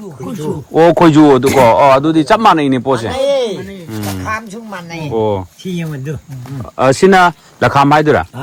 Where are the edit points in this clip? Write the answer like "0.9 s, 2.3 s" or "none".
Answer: none